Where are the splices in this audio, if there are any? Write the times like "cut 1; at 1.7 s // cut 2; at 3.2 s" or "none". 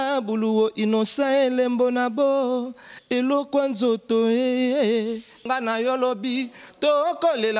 cut 1; at 5.4 s